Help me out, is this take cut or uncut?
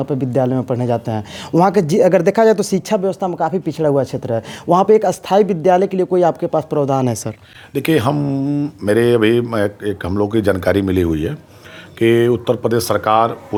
uncut